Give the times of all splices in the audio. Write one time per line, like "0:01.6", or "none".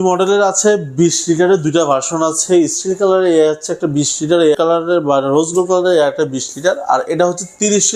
none